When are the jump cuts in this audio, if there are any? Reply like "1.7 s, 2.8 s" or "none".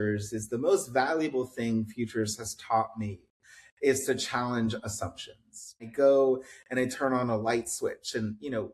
5.9 s

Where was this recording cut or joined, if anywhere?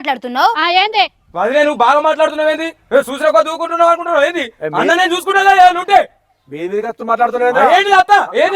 none

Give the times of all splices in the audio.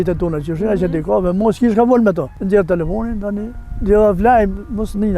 2.3 s

